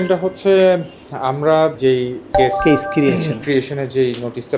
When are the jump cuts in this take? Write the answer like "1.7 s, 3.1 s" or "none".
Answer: 2.3 s